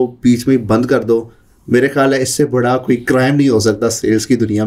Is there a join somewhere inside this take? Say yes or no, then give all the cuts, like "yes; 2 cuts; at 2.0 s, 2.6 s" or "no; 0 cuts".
no; 0 cuts